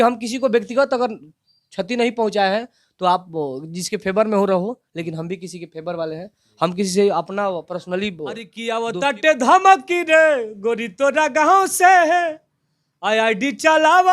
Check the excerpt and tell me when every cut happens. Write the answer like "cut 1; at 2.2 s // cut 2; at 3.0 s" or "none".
cut 1; at 8.6 s